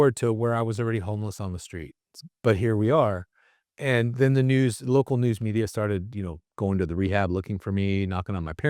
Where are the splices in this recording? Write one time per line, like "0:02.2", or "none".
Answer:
0:02.2